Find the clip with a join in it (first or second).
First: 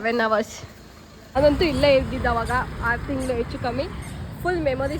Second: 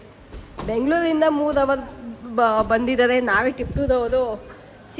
first